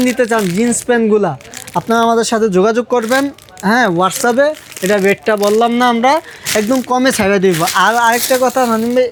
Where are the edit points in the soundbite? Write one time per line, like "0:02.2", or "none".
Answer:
none